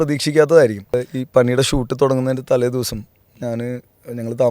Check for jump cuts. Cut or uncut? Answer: cut